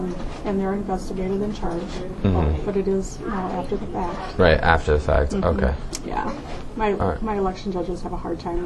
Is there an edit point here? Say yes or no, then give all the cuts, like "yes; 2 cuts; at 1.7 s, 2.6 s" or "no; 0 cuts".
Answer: no; 0 cuts